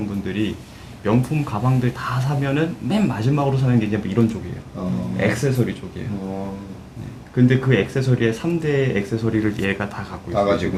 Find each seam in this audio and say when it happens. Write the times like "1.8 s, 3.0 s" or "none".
none